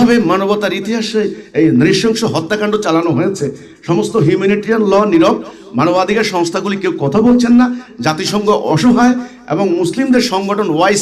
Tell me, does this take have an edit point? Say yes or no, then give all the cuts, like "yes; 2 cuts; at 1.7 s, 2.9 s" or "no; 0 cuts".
no; 0 cuts